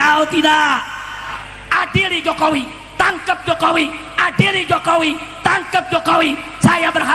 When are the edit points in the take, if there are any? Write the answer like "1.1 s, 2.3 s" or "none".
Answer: 1.4 s